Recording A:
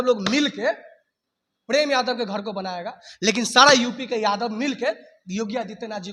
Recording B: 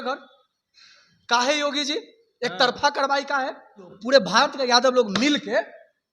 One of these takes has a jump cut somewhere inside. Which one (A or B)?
B